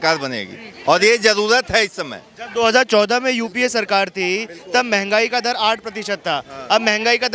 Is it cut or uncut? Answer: uncut